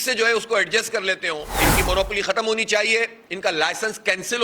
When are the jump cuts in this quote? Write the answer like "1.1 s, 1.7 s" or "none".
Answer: 1.7 s